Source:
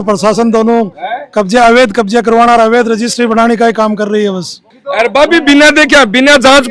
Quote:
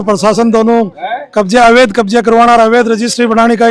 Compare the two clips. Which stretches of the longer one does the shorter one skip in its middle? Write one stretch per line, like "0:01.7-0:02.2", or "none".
none

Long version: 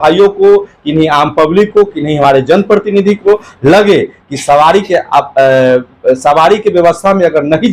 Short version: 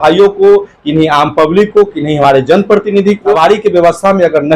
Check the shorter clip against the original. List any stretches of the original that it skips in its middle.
0:03.4-0:06.4

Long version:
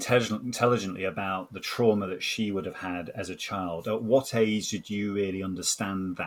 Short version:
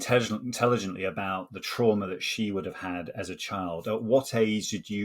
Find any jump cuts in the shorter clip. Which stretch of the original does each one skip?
none

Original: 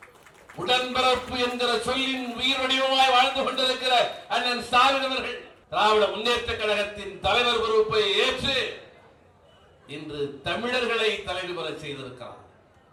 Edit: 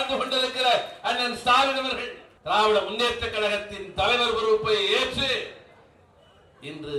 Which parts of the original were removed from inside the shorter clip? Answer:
none

